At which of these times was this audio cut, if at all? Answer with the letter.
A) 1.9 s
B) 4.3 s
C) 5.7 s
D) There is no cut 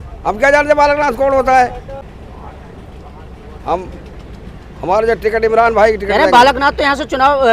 D